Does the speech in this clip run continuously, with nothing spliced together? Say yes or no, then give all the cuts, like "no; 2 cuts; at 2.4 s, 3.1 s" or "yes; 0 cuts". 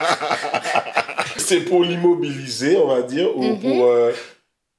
no; 1 cut; at 1.4 s